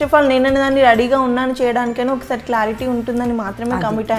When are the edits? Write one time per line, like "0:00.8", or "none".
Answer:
none